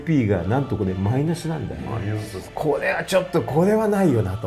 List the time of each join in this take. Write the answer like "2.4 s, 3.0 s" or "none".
2.4 s

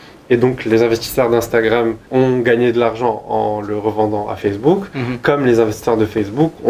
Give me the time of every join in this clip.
2.0 s

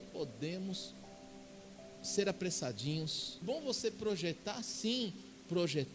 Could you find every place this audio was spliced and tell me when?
3.4 s

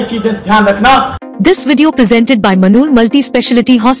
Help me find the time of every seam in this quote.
1.2 s

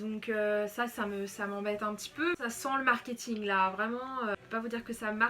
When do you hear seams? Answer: 2.3 s, 4.4 s

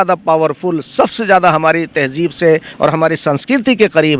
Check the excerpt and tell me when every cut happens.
none

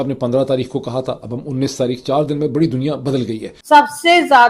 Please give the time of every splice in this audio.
3.5 s

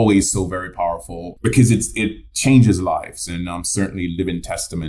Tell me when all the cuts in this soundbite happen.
1.3 s

